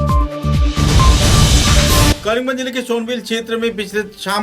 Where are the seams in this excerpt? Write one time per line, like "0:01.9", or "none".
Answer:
0:02.2